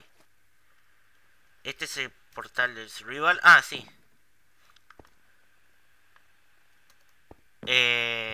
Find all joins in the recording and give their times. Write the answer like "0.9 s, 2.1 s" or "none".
none